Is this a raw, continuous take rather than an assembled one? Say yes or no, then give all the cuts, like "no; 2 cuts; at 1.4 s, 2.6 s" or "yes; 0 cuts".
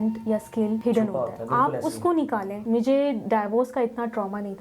no; 2 cuts; at 0.8 s, 2.5 s